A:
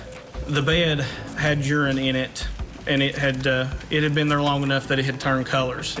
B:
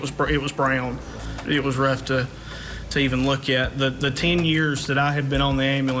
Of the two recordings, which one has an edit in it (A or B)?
B